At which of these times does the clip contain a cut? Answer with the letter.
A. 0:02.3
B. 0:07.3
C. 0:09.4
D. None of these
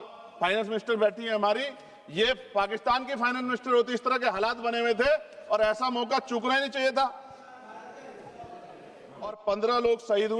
C